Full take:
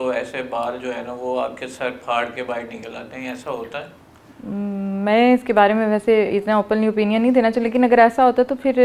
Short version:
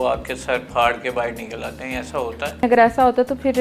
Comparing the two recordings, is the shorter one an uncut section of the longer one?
no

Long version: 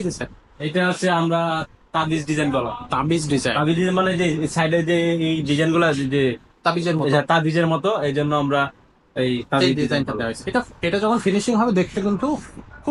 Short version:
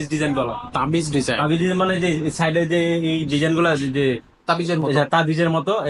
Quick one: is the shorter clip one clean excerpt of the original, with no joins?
yes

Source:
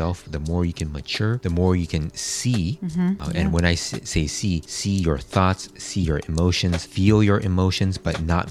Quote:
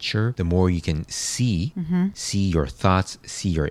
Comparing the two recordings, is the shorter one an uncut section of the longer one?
no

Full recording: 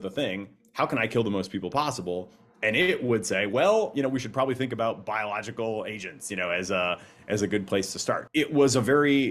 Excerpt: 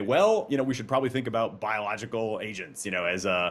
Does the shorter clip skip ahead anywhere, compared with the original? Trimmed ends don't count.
no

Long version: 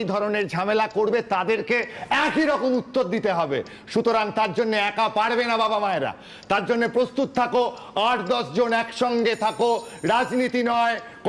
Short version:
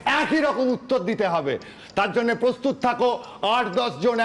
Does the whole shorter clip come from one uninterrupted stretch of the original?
no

